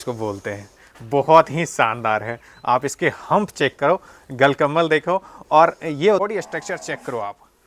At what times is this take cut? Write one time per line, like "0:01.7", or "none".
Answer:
0:06.2